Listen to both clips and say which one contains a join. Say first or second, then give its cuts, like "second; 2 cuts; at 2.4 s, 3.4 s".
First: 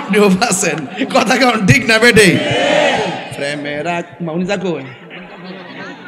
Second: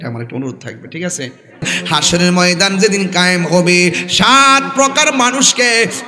second; 1 cut; at 1.7 s